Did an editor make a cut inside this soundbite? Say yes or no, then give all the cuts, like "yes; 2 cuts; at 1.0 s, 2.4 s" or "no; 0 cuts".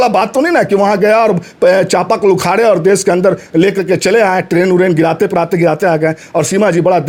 no; 0 cuts